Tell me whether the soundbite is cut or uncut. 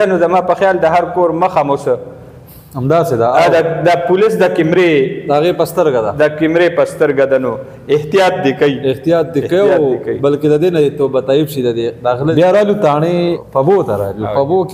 cut